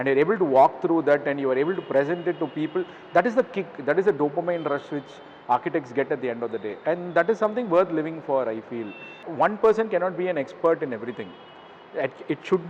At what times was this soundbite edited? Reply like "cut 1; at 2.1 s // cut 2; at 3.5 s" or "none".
cut 1; at 9.2 s